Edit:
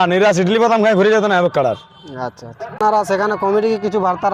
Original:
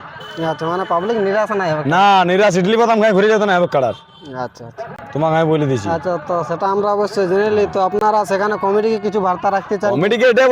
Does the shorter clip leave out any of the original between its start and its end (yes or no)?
yes